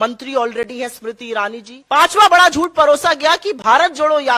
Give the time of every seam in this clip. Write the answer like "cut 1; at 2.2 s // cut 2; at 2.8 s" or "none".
cut 1; at 1.7 s